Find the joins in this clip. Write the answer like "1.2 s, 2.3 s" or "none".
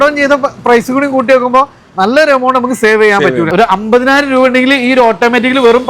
3.5 s